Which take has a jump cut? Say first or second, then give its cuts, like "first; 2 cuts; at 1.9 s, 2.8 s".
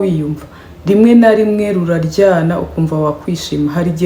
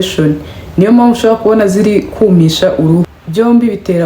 second; 1 cut; at 3.1 s